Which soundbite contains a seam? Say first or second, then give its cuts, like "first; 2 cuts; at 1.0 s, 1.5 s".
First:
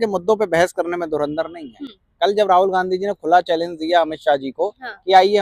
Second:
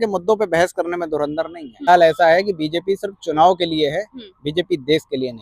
second; 1 cut; at 1.9 s